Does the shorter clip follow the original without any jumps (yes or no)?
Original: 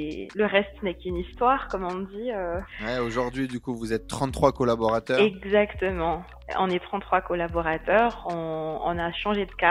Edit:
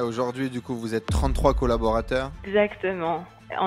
yes